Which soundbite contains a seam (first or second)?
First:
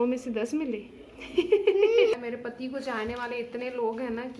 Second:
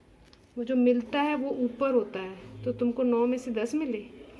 first